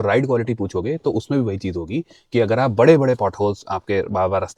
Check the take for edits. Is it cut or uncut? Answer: uncut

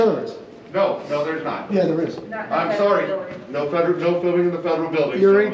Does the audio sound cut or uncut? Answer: cut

